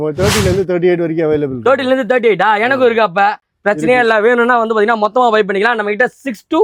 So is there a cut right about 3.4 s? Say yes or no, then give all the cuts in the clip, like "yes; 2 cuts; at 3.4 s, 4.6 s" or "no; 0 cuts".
no; 0 cuts